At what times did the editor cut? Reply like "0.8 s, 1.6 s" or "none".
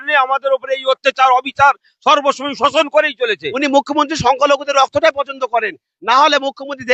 3.6 s